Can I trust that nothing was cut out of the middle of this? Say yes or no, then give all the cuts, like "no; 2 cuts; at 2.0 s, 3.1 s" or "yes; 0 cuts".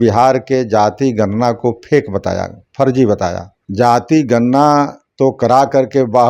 no; 1 cut; at 3.6 s